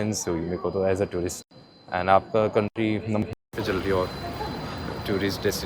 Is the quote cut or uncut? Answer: uncut